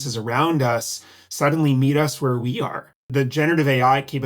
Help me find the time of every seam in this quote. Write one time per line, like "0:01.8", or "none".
0:03.1